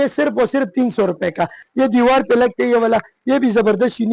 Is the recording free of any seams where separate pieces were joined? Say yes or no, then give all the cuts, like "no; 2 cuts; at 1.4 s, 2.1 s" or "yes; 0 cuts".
no; 1 cut; at 1.6 s